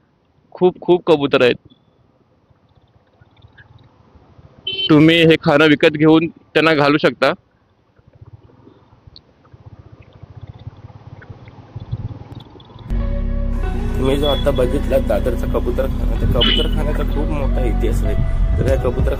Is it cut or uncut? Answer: uncut